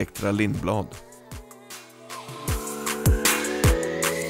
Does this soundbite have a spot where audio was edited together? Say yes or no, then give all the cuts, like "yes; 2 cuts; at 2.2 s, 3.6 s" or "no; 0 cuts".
yes; 1 cut; at 1.0 s